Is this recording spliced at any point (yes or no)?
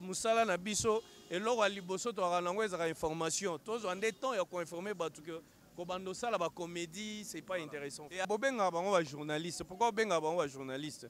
yes